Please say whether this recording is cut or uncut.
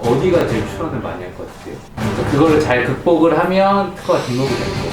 cut